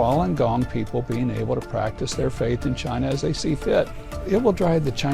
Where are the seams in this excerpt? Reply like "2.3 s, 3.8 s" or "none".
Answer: 4.2 s